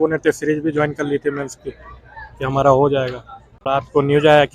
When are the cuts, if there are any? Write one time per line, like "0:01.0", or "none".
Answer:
0:03.6